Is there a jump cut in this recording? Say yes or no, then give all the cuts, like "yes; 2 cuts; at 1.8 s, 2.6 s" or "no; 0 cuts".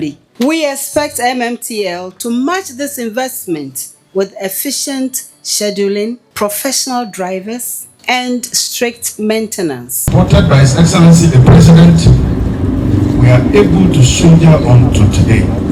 yes; 1 cut; at 10.1 s